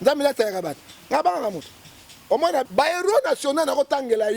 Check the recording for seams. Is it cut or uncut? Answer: cut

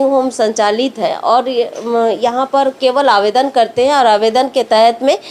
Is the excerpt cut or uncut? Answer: uncut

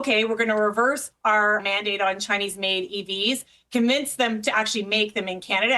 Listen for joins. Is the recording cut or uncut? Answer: cut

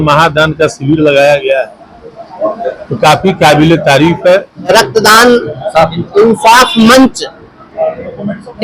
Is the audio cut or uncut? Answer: cut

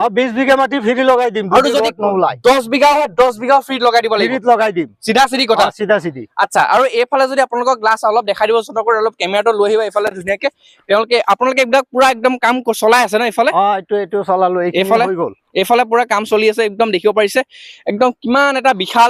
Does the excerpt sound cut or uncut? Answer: uncut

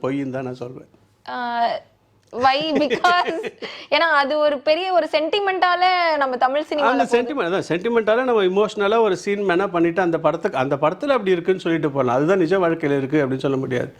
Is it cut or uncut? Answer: uncut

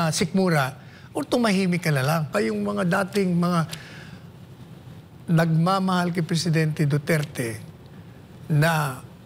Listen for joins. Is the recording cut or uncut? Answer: cut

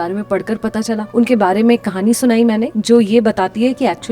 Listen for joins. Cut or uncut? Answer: cut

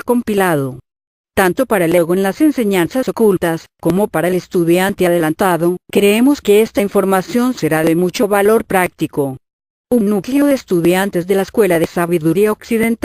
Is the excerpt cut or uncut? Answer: uncut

